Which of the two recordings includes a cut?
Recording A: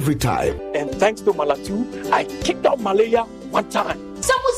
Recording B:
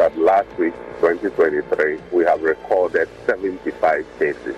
B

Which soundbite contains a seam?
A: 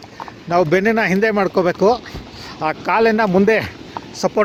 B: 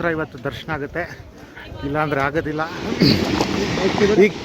B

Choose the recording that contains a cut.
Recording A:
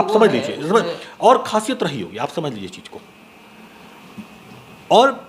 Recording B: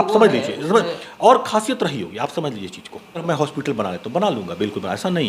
B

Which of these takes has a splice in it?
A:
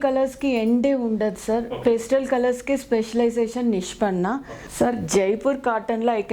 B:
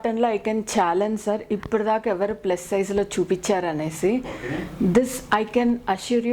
A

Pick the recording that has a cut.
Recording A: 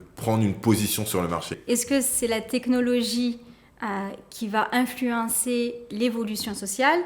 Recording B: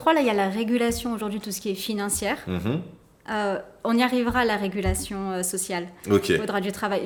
A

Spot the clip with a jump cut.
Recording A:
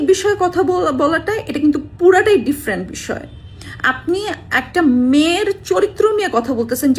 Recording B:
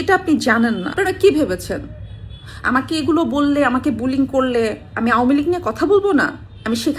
B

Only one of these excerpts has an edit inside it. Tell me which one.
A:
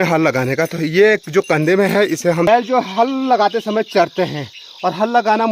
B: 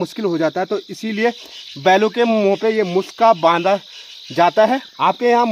A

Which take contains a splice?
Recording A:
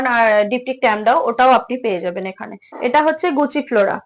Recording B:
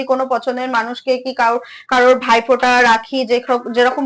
A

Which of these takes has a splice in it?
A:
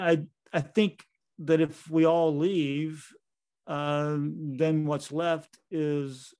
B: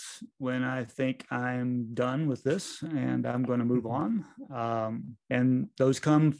B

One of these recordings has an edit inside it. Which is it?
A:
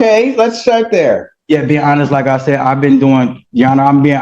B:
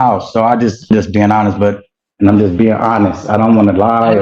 B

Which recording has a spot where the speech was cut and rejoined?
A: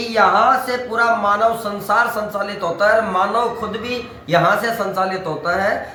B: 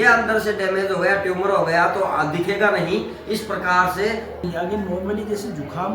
B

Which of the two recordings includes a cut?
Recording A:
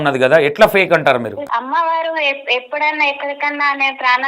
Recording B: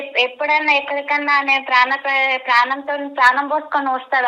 A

